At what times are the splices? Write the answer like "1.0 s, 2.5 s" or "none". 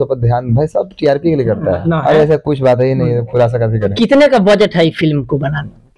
1.8 s, 3.9 s